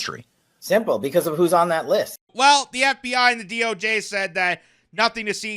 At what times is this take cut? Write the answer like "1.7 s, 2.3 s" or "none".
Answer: 2.3 s

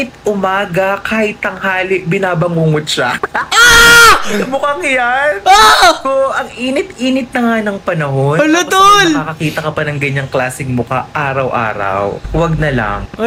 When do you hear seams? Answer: none

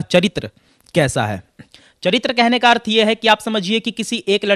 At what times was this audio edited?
none

